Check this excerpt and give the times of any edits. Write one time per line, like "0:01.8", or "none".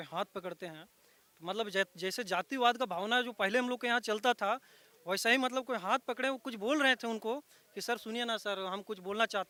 none